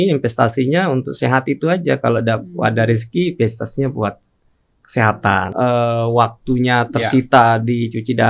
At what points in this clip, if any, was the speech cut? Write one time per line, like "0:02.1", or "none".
0:05.5